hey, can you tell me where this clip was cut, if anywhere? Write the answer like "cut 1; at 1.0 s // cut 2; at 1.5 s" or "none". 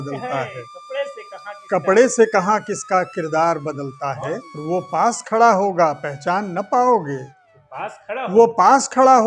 cut 1; at 4.5 s